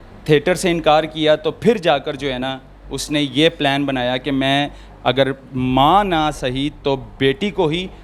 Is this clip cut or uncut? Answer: uncut